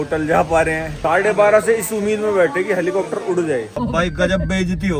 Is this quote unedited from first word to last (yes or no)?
no